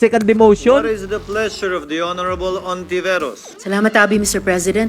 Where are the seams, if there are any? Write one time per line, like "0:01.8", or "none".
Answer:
none